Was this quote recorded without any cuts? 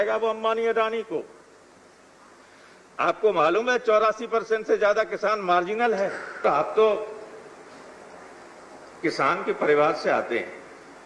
no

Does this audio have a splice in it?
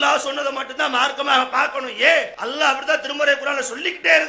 yes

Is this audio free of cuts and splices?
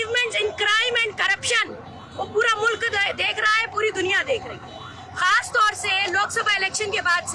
yes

